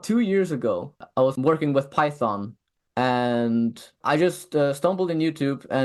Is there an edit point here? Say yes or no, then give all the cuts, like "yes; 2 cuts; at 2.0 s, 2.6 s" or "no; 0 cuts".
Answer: yes; 2 cuts; at 1.0 s, 4.0 s